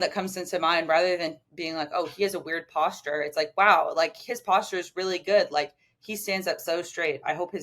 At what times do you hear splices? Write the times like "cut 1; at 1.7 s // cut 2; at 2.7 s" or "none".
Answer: none